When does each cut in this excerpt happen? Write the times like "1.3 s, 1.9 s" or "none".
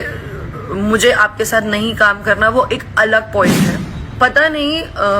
3.9 s